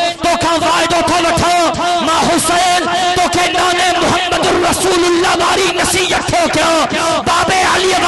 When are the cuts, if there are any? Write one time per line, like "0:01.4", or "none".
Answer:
none